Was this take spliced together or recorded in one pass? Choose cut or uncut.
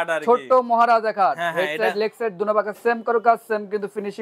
uncut